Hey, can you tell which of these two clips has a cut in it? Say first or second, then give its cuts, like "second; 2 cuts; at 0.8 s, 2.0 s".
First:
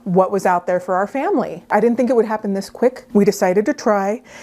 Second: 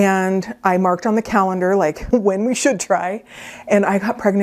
first; 2 cuts; at 1.6 s, 3.0 s